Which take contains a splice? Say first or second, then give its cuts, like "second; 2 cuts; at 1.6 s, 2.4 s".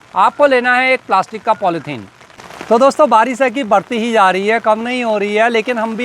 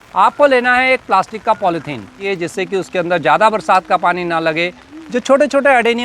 second; 2 cuts; at 2.2 s, 4.9 s